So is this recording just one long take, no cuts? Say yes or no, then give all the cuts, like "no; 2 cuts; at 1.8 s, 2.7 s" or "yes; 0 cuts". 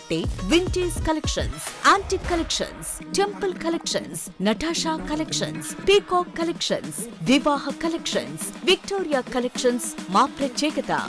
yes; 0 cuts